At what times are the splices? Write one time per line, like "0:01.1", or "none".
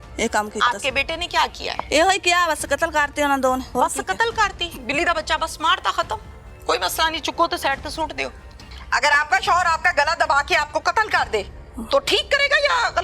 0:01.8
0:03.7
0:08.7